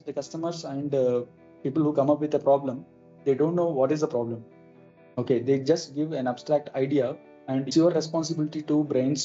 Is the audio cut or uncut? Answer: cut